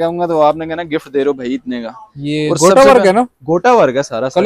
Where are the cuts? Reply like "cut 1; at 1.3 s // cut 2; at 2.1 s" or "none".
none